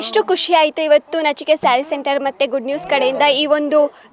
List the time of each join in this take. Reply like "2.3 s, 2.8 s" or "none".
none